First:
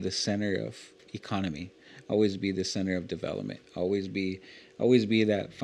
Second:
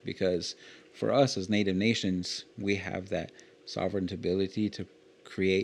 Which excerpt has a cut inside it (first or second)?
first